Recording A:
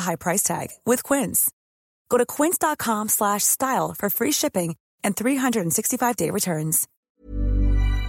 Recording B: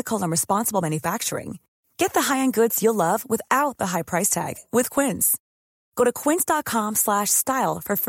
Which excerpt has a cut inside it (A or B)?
A